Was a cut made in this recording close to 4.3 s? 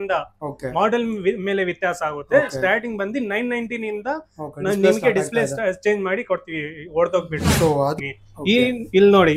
no; 1 cut; at 7.9 s

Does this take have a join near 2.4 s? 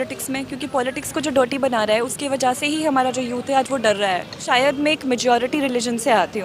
no; 1 cut; at 4.4 s

